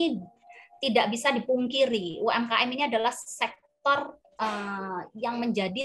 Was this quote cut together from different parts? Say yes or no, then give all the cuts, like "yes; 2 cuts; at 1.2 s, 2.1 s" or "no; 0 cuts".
no; 0 cuts